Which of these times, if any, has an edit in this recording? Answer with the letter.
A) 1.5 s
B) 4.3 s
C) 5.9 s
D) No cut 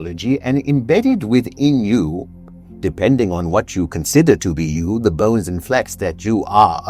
D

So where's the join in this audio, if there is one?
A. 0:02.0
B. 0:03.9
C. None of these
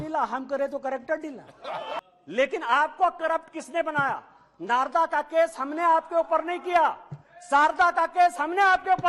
A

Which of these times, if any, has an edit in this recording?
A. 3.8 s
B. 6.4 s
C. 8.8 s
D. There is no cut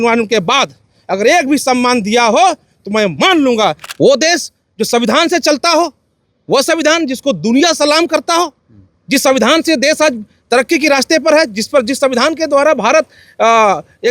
A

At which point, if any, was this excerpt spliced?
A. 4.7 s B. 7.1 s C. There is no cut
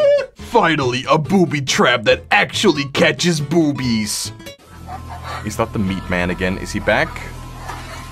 A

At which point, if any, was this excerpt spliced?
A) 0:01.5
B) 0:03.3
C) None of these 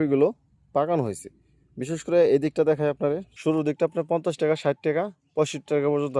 B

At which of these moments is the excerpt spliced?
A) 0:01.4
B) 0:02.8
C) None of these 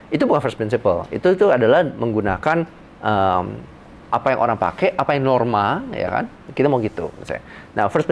C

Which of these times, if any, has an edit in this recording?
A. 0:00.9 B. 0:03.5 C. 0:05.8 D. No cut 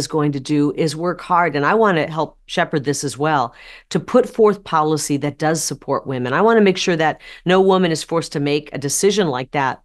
D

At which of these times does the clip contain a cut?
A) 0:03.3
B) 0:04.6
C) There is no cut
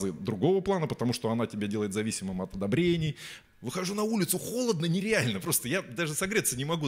A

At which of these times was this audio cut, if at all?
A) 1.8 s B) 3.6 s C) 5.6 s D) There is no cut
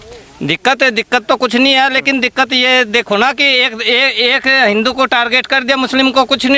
D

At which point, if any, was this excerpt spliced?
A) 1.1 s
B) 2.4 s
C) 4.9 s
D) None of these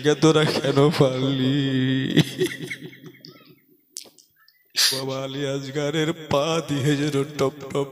C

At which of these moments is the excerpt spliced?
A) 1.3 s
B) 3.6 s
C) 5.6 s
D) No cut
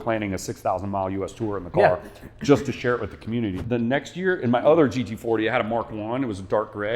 B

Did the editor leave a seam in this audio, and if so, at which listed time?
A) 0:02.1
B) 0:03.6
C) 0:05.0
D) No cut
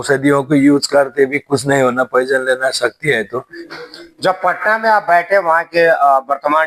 B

